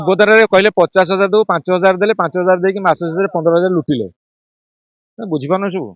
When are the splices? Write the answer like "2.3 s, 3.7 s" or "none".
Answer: none

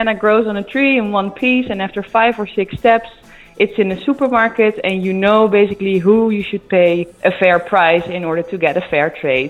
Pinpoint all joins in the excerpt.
none

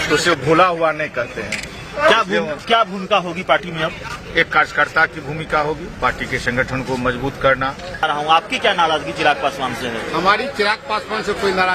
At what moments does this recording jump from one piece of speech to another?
8.0 s

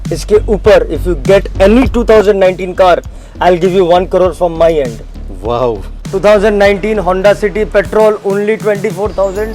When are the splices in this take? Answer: 6.0 s

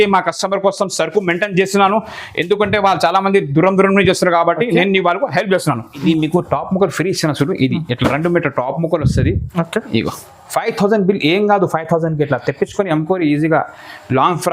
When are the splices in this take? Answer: 5.9 s

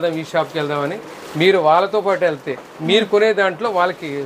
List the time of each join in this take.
none

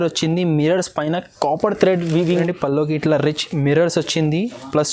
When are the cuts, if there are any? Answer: 2.3 s

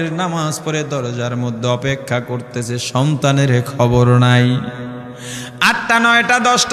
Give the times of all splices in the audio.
none

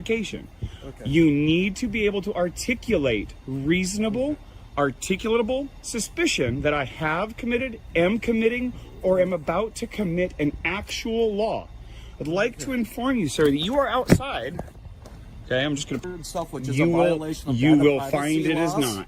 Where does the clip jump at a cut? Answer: 16.0 s

